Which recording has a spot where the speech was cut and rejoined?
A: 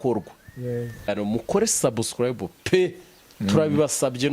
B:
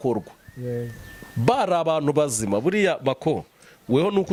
A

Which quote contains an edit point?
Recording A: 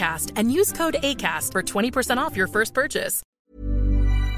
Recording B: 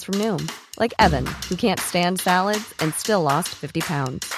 A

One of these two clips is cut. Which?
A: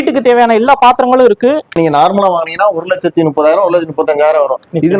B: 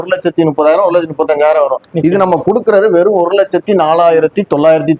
A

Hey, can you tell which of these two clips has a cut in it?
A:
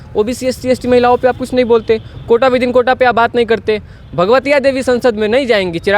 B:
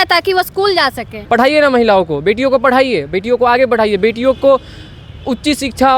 B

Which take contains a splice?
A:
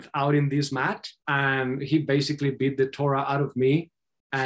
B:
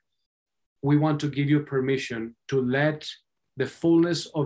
A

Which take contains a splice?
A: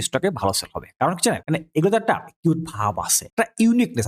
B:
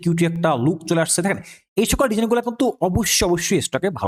A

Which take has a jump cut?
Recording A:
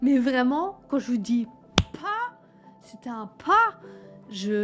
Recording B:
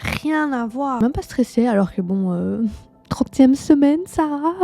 B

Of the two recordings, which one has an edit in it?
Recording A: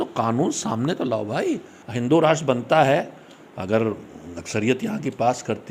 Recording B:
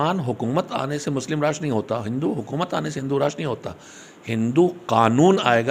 A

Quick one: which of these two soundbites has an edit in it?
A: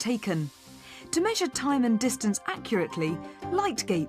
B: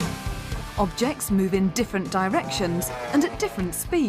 A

